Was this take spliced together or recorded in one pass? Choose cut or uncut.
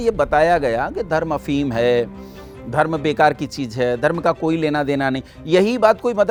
uncut